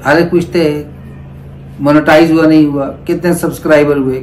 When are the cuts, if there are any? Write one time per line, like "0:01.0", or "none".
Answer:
none